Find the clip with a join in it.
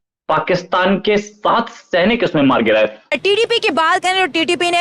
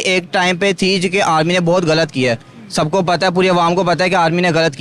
first; 1 cut; at 3.1 s

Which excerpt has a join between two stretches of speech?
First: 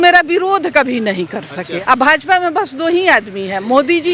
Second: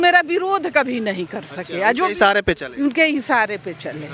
first; 1 cut; at 1.7 s

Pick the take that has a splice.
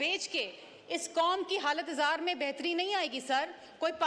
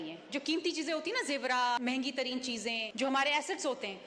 second; 2 cuts; at 1.8 s, 2.9 s

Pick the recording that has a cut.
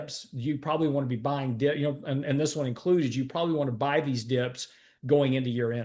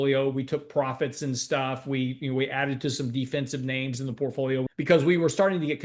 second; 1 cut; at 4.7 s

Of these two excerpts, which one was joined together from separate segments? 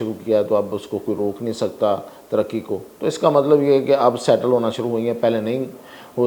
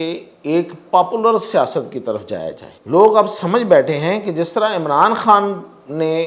second; 1 cut; at 2.7 s

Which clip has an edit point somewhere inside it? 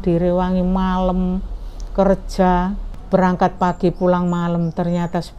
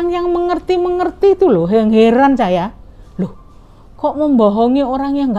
first; 1 cut; at 2.9 s

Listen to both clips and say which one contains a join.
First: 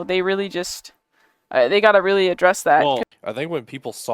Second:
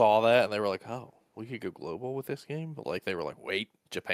first; 1 cut; at 3.1 s

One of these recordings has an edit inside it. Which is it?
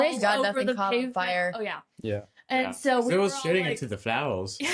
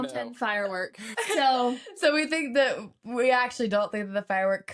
second; 1 cut; at 1.1 s

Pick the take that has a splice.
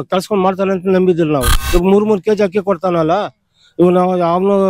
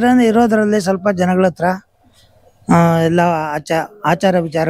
first; 1 cut; at 1.6 s

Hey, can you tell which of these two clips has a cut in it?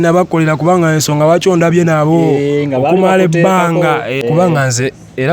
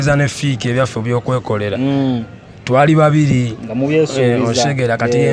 first; 1 cut; at 4.2 s

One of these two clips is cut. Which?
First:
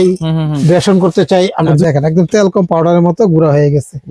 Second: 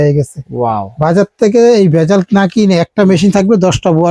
first; 1 cut; at 1.8 s

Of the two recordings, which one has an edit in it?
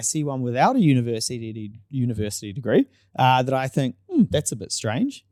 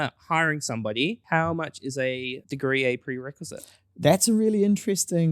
second; 2 cuts; at 1.2 s, 2.4 s

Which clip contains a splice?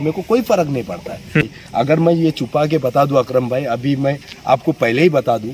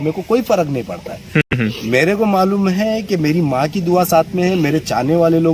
first; 1 cut; at 1.5 s

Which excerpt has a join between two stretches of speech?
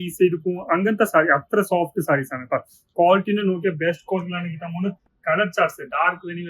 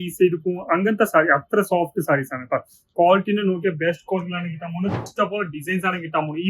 second; 1 cut; at 5.0 s

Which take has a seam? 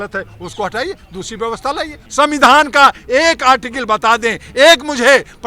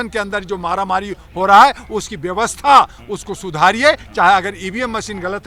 first; 1 cut; at 2.0 s

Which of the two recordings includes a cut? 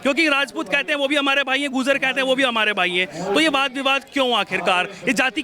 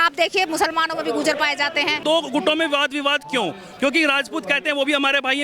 second; 1 cut; at 2.0 s

